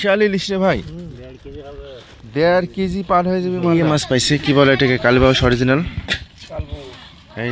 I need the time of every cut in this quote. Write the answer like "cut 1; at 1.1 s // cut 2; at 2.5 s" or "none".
cut 1; at 3.6 s